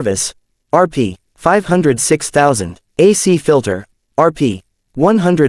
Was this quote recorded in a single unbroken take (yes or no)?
no